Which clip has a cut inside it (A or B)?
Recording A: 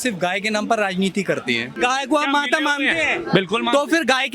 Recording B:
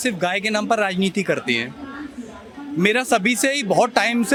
A